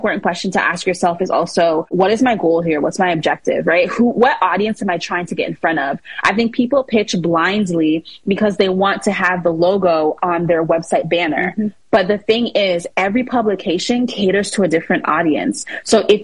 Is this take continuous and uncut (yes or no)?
yes